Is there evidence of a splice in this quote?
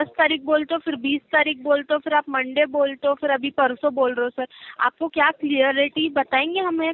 no; 0 cuts

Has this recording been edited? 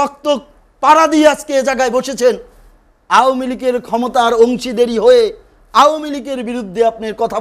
no; 0 cuts

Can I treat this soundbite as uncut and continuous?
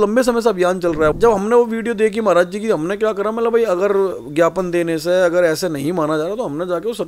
no; 1 cut; at 1.2 s

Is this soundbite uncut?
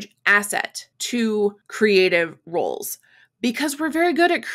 yes; 0 cuts

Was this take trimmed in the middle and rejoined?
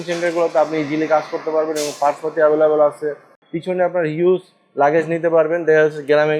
yes; 1 cut; at 3.3 s

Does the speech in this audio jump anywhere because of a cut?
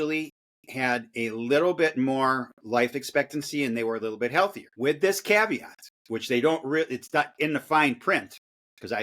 yes; 1 cut; at 4.6 s

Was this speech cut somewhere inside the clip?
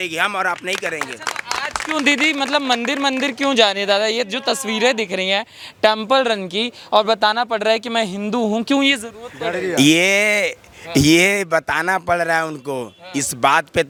no; 0 cuts

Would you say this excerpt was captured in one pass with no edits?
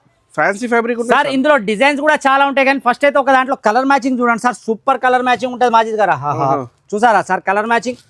yes; 0 cuts

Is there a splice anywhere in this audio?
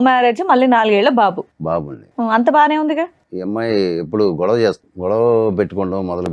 yes; 2 cuts; at 3.3 s, 4.9 s

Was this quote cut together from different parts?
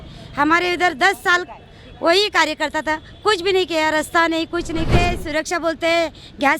yes; 1 cut; at 4.9 s

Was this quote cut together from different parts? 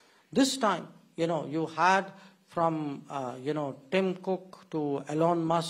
no; 0 cuts

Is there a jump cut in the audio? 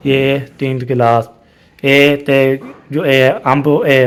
no; 0 cuts

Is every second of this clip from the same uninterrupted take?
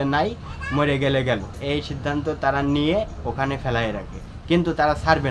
no; 1 cut; at 1.6 s

